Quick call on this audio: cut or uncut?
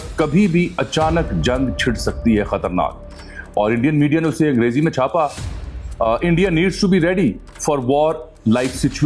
uncut